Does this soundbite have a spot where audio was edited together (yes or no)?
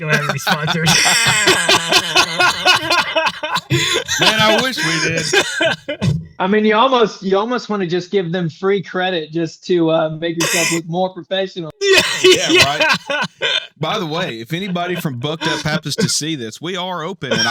no